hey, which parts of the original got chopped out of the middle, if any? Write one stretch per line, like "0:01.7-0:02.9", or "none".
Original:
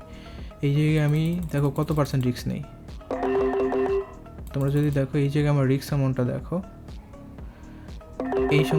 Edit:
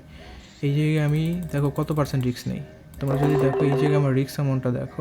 0:03.9-0:05.5